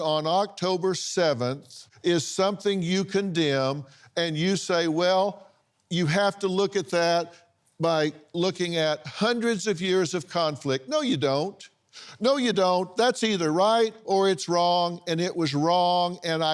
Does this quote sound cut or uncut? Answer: uncut